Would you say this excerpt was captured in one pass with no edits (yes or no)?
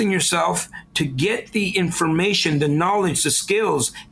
yes